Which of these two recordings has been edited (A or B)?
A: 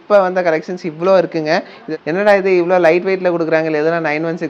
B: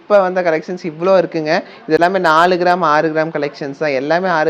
A